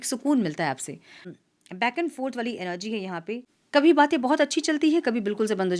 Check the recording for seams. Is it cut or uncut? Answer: cut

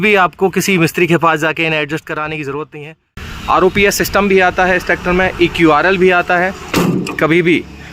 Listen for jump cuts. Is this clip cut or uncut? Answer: cut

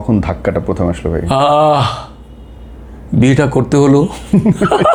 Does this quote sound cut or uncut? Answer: uncut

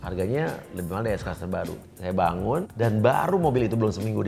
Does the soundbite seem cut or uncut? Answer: cut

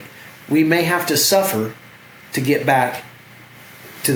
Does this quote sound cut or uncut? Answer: uncut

